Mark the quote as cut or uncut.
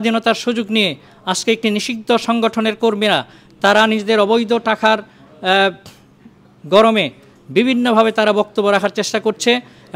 uncut